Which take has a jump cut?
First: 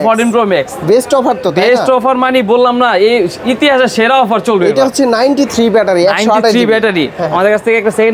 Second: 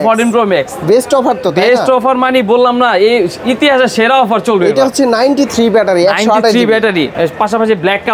first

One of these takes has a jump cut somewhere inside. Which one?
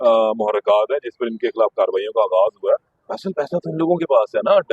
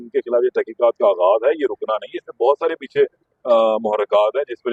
first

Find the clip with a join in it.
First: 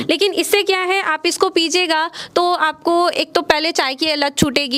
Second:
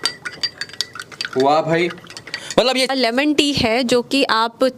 second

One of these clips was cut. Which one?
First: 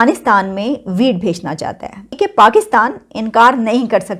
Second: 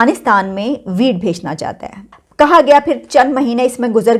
first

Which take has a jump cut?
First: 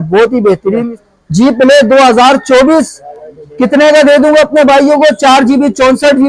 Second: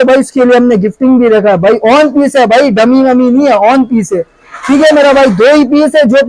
first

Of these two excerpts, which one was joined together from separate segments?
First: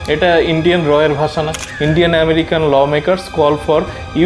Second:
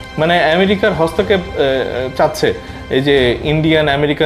first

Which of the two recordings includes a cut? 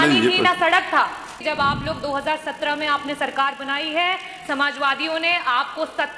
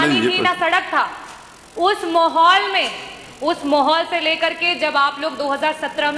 first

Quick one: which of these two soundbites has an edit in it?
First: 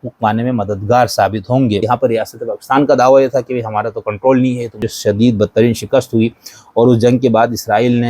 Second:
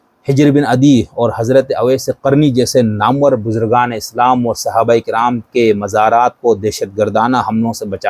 first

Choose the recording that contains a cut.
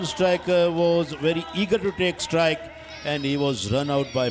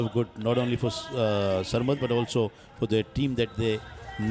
first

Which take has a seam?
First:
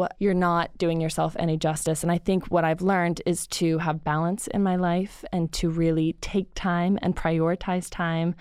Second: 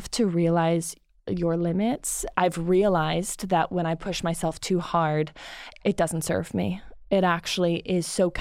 second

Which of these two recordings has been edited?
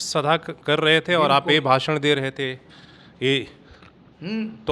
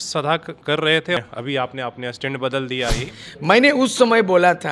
second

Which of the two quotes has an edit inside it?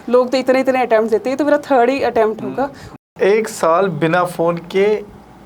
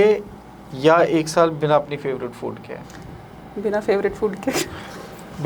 first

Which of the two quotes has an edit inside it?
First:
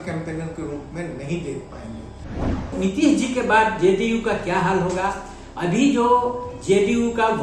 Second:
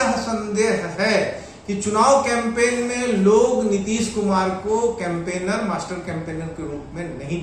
first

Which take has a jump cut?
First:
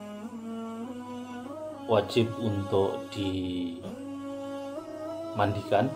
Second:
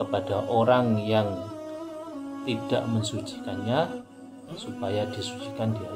first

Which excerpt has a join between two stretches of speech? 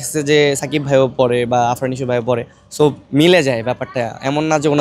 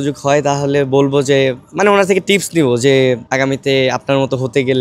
second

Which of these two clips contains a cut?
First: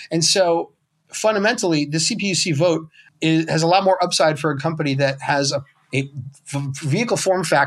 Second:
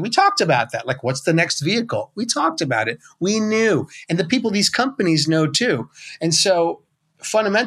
first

